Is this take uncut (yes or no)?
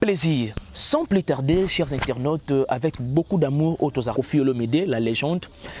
no